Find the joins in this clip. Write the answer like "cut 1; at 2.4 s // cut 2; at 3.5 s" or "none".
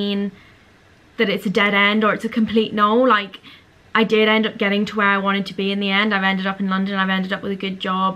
none

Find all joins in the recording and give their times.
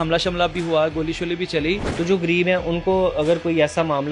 cut 1; at 1.9 s

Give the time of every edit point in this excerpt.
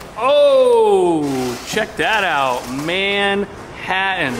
none

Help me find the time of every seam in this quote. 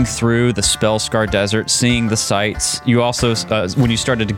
cut 1; at 2.8 s

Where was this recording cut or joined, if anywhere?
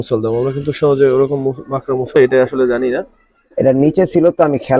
cut 1; at 2.2 s

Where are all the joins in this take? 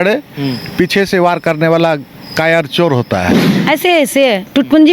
cut 1; at 3.5 s

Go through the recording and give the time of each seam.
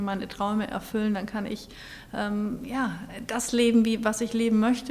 none

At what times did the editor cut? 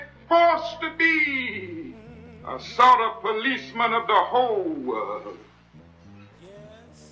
none

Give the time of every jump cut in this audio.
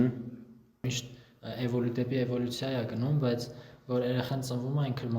cut 1; at 1.0 s

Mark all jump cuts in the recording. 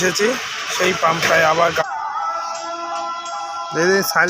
cut 1; at 1.8 s

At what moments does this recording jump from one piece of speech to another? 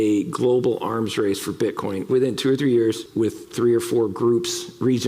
cut 1; at 2.1 s // cut 2; at 3.1 s

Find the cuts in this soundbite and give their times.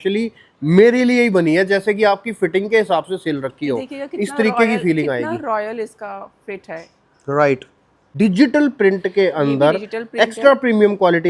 cut 1; at 8.0 s

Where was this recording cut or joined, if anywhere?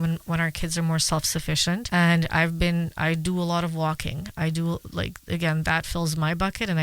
cut 1; at 1.9 s

